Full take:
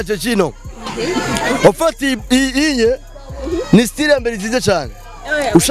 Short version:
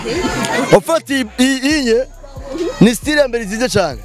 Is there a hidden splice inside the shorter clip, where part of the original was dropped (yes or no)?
no